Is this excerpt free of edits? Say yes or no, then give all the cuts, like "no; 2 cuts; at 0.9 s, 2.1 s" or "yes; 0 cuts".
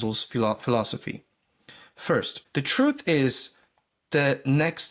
no; 1 cut; at 2.4 s